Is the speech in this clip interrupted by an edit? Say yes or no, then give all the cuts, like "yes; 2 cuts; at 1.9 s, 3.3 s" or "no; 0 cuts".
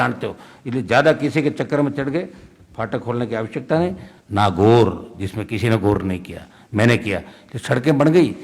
yes; 1 cut; at 4.1 s